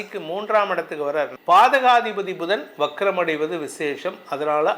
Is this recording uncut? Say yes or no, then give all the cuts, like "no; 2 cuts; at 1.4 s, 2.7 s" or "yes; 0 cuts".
no; 1 cut; at 1.3 s